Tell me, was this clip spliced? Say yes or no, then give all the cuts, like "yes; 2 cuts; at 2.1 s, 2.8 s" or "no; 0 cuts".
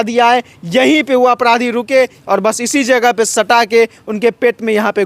yes; 1 cut; at 2.2 s